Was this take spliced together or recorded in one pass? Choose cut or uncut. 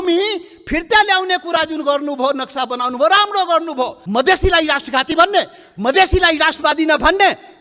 cut